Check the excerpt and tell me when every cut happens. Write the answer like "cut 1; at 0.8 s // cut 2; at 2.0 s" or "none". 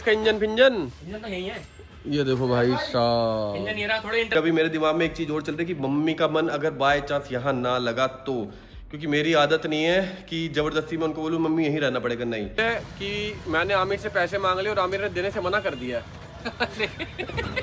cut 1; at 4.3 s // cut 2; at 12.6 s